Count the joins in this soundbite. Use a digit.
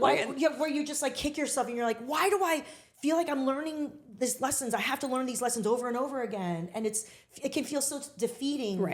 0